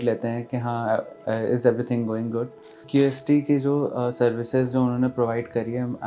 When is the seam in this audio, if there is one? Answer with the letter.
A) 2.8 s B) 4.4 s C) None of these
A